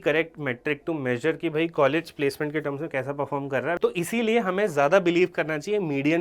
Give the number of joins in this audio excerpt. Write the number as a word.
one